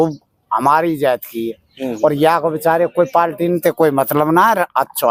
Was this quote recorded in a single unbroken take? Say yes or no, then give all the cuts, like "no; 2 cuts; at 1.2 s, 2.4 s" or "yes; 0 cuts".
yes; 0 cuts